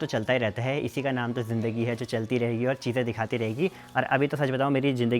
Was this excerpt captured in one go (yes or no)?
yes